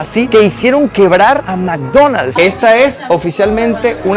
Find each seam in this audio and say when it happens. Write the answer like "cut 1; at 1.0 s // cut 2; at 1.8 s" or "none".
cut 1; at 1.5 s // cut 2; at 2.3 s